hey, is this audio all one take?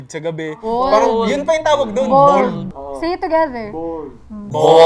yes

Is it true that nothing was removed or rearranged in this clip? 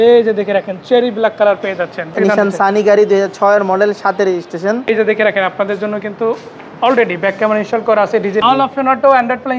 no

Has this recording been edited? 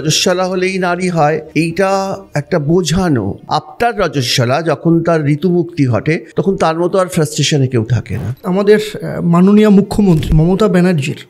yes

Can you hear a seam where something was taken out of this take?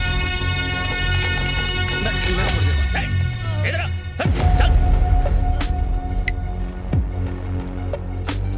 yes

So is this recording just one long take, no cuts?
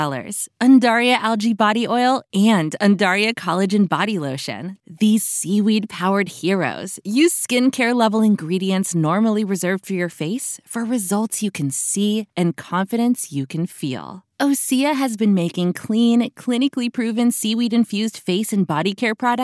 yes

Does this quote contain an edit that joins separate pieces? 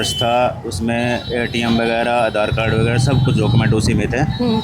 no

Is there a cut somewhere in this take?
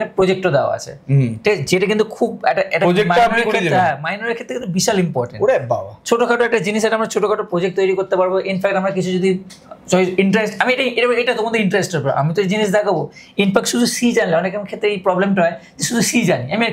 no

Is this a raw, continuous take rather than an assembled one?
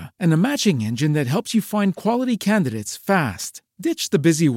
yes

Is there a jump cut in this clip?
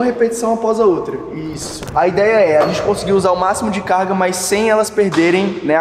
yes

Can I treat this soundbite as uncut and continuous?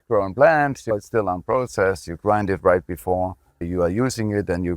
no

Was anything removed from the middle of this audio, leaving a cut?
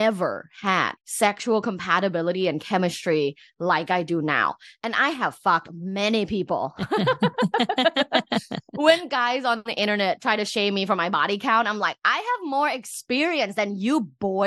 yes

